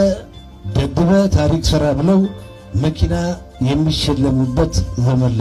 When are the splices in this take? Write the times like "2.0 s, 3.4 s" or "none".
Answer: none